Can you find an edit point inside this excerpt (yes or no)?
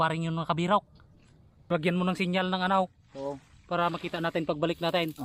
yes